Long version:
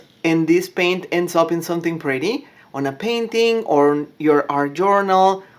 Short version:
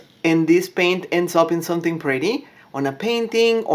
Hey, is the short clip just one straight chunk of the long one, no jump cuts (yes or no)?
yes